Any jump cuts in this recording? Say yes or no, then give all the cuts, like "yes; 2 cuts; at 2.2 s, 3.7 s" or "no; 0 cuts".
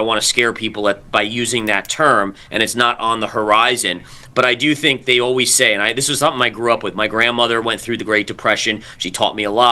no; 0 cuts